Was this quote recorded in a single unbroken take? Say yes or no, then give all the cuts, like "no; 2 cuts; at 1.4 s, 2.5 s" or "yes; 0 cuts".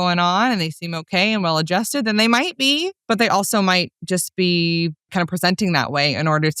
no; 2 cuts; at 2.9 s, 5.1 s